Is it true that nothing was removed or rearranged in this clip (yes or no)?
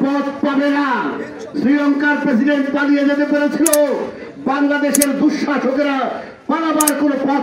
yes